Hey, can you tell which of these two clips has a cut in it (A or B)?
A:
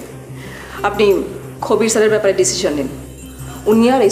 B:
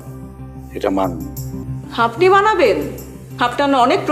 B